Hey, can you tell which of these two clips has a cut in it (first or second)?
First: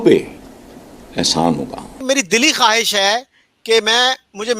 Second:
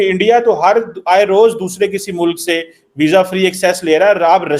first